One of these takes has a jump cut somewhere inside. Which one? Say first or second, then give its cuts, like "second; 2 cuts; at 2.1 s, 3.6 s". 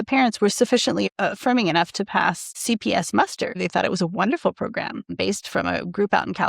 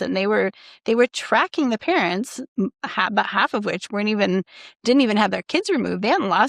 first; 4 cuts; at 1.1 s, 2.6 s, 3.6 s, 5.1 s